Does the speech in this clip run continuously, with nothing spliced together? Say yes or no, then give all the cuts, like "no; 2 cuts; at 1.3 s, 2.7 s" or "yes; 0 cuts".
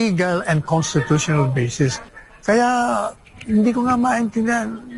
no; 1 cut; at 2.1 s